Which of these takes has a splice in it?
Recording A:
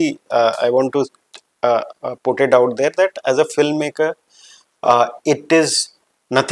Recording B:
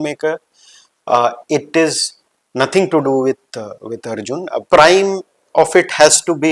B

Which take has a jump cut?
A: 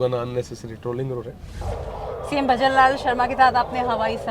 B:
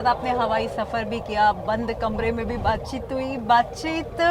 A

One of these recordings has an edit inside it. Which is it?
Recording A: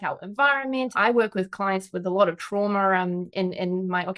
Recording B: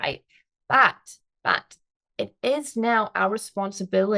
A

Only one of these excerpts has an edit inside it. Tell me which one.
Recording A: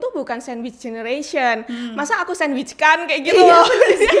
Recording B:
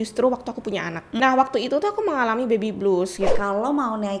B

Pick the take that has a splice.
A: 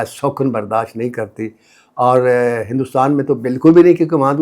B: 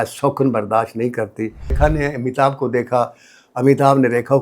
B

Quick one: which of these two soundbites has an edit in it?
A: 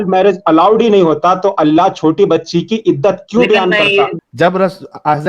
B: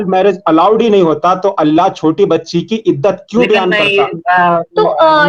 A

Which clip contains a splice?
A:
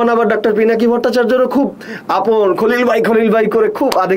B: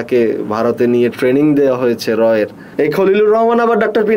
B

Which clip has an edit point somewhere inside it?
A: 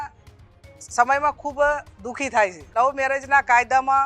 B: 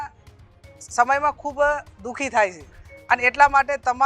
A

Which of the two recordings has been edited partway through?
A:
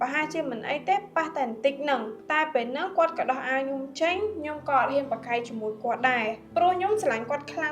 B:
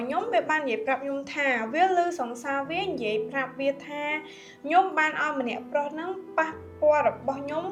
A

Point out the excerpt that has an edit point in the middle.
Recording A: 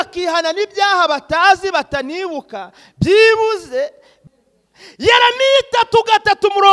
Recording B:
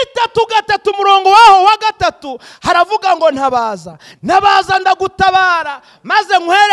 A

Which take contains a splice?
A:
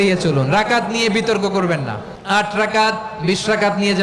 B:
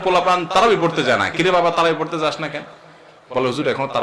A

